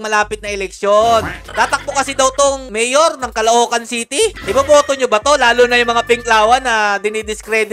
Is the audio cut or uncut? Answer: cut